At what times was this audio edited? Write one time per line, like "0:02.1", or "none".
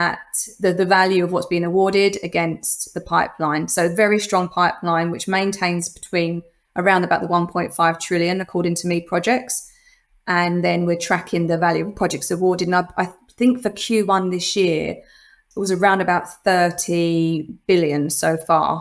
0:15.4